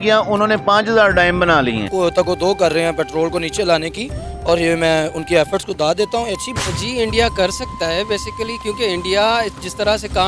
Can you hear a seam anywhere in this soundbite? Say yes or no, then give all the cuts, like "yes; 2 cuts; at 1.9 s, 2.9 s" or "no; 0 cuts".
yes; 2 cuts; at 1.9 s, 6.4 s